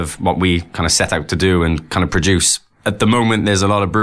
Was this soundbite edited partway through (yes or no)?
yes